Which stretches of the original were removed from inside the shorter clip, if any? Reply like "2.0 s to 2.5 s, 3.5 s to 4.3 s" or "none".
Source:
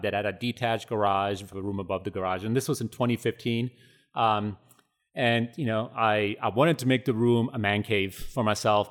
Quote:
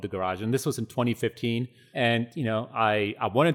3.8 s to 5.0 s